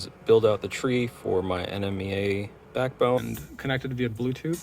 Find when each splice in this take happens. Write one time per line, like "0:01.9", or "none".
0:03.2